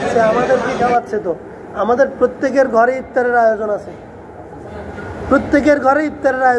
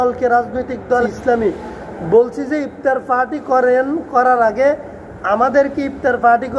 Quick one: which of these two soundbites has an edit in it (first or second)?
second